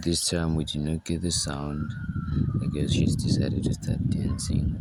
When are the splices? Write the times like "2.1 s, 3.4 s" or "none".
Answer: none